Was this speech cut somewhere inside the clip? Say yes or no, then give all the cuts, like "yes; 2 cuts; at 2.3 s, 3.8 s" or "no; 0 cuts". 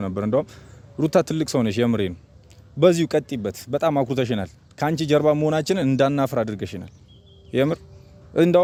no; 0 cuts